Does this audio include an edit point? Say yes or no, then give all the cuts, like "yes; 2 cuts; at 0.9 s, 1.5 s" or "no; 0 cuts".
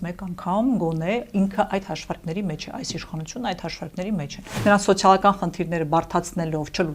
yes; 1 cut; at 4.5 s